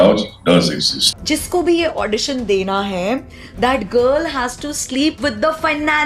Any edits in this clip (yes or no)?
yes